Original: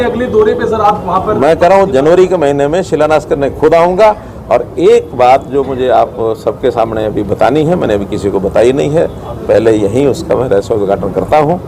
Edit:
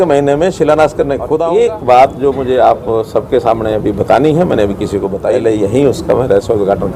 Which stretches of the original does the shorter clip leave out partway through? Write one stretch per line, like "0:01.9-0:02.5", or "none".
0:03.7-0:04.7
0:08.5-0:09.4